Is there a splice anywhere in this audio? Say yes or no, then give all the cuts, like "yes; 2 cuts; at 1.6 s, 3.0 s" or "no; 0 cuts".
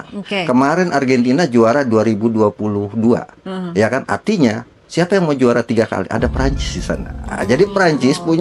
no; 0 cuts